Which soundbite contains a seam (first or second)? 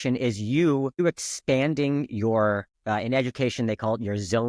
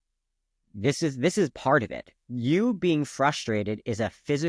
first